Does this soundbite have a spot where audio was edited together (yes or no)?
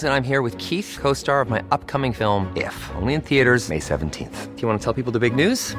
no